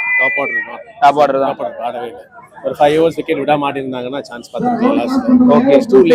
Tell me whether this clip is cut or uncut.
uncut